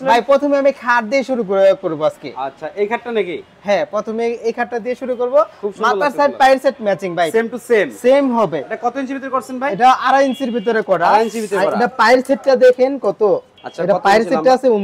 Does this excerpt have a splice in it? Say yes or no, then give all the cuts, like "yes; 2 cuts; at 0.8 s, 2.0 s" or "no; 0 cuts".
no; 0 cuts